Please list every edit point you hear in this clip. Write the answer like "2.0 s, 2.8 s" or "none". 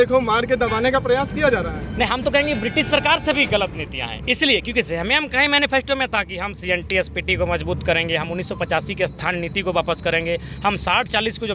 none